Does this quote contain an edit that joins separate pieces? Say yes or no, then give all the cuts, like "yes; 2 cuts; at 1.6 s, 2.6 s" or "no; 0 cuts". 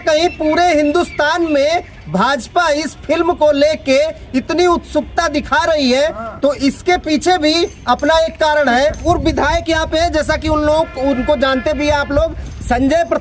yes; 1 cut; at 9.1 s